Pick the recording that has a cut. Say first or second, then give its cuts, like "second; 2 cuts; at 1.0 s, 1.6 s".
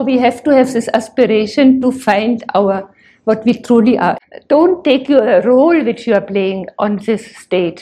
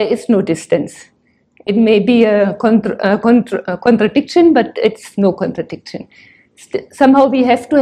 first; 1 cut; at 4.2 s